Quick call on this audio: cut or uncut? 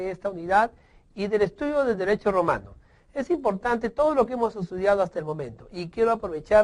uncut